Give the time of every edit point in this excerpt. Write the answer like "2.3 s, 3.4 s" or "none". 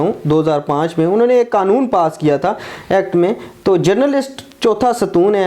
none